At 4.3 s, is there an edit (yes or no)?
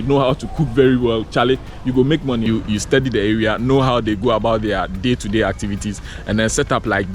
no